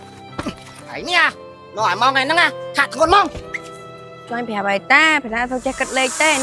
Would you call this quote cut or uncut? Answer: uncut